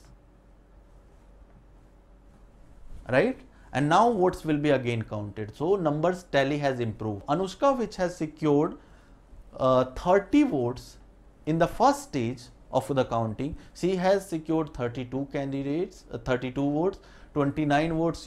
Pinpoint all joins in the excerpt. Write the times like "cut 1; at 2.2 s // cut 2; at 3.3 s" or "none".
none